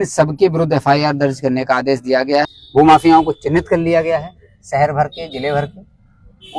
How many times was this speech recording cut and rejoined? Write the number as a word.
one